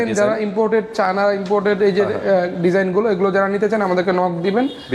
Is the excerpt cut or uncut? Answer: uncut